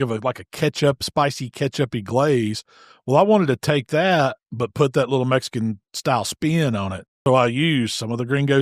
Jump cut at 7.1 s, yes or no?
yes